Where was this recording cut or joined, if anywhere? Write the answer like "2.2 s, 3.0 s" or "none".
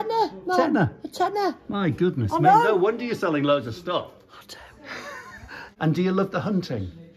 5.6 s